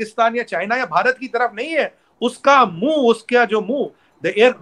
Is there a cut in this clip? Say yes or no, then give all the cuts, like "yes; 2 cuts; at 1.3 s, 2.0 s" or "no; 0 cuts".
no; 0 cuts